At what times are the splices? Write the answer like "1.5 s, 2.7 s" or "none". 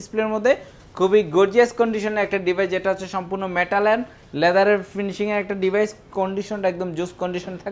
none